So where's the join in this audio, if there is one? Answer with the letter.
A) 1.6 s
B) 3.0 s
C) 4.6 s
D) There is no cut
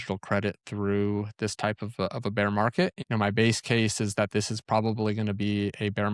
B